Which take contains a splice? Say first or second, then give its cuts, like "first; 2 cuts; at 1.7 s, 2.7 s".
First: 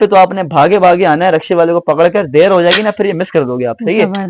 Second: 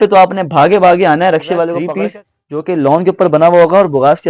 second; 1 cut; at 1.8 s